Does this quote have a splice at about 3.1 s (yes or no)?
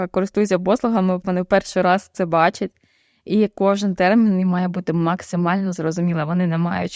no